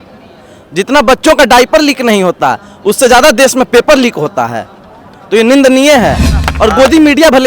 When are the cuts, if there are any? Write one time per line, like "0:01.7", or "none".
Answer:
0:06.3